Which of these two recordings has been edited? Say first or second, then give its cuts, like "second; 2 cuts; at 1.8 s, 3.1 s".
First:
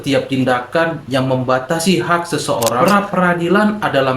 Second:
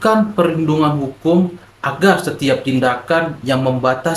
first; 1 cut; at 2.8 s